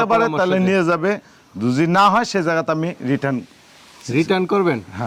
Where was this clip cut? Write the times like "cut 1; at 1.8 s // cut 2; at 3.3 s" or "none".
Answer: none